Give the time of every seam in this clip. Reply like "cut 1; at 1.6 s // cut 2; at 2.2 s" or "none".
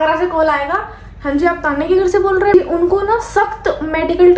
cut 1; at 2.5 s